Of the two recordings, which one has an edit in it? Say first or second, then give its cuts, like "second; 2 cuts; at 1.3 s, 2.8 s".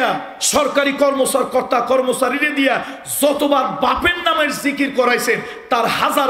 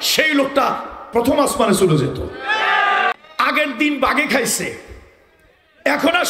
second; 1 cut; at 3.1 s